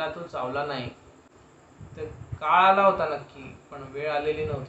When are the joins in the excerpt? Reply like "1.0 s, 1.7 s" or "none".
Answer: none